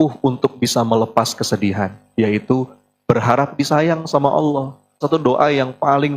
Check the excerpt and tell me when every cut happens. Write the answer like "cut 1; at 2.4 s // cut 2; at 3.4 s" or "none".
cut 1; at 5.0 s

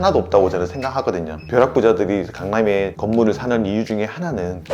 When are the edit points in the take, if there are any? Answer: cut 1; at 1.4 s

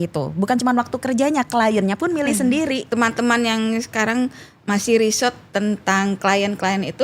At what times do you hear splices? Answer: cut 1; at 2.9 s

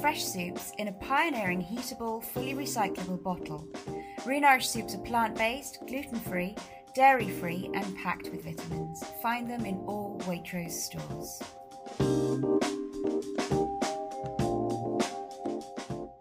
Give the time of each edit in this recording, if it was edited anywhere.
cut 1; at 10.7 s

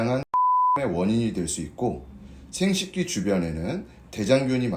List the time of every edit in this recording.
none

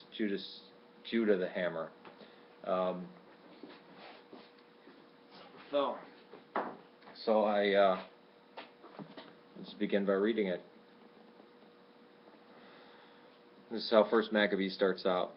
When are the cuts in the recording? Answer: cut 1; at 9.3 s

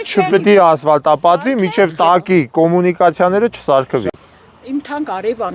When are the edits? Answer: cut 1; at 4.2 s

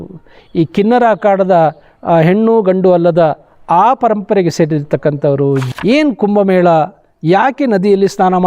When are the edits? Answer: cut 1; at 5.6 s

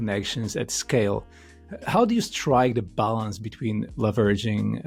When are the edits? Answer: none

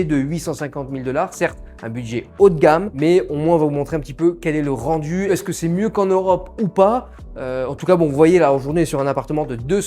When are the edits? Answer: none

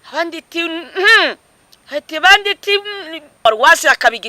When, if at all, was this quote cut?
cut 1; at 3.4 s

